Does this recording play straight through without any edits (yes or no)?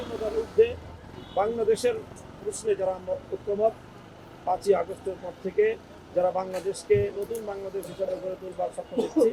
yes